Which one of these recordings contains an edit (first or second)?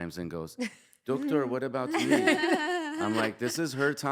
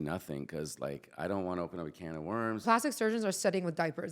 second